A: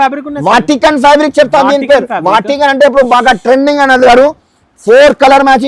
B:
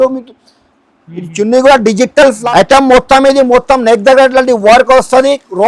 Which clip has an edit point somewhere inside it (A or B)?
B